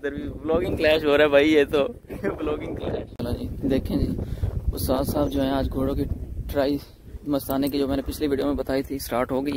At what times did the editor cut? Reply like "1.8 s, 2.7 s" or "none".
none